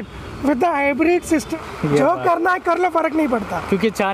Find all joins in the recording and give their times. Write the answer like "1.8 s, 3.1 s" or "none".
1.5 s